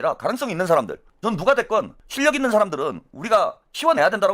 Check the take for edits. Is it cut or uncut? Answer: cut